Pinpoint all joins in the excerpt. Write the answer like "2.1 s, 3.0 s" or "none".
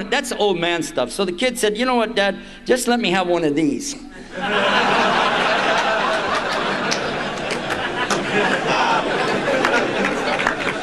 none